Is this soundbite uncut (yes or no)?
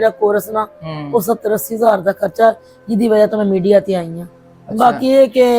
yes